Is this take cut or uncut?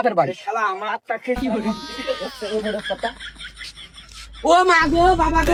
uncut